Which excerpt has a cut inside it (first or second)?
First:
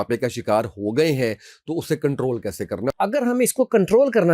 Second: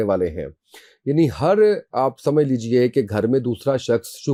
first